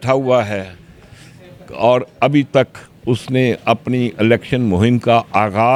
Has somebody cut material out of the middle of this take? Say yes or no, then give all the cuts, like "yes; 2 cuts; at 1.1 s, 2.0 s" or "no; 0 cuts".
no; 0 cuts